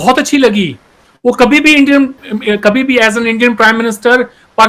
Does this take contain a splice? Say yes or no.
no